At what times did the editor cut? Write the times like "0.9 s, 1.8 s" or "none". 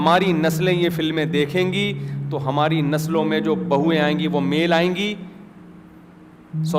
none